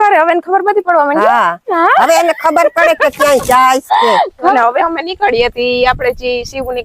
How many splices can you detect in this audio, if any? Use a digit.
1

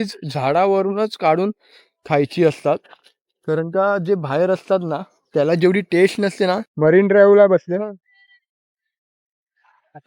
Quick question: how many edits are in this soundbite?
1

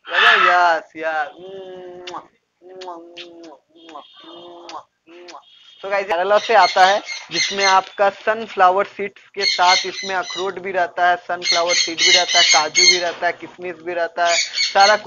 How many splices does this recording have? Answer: 1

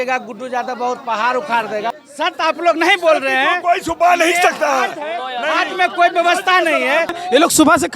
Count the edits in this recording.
2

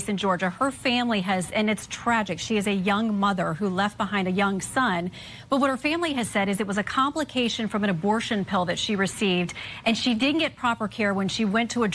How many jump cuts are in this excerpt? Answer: 1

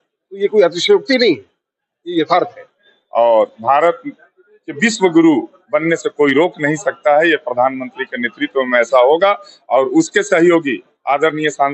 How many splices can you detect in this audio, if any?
1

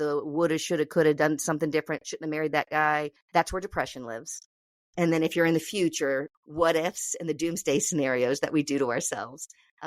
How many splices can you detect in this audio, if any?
2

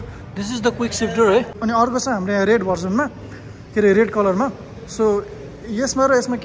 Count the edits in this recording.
1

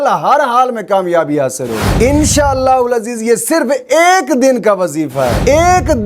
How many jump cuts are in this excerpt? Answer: 1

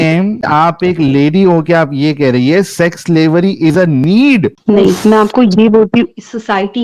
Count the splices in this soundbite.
0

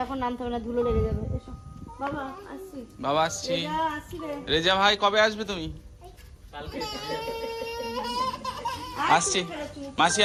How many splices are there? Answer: 0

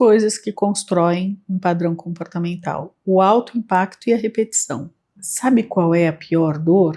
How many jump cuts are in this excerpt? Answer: 1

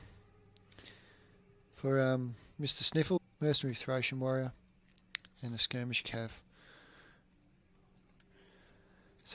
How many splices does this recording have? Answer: 0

